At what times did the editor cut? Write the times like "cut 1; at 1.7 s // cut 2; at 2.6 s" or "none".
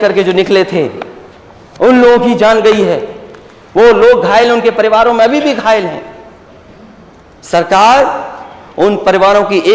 none